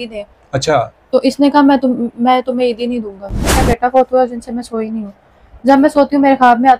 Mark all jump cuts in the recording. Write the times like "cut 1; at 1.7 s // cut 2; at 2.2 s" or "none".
cut 1; at 3.6 s